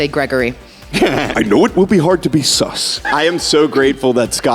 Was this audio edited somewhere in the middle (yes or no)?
yes